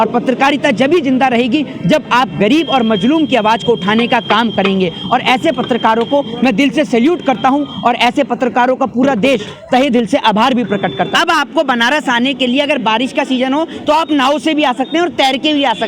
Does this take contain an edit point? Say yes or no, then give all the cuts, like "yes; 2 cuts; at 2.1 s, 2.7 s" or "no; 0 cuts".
yes; 1 cut; at 11.1 s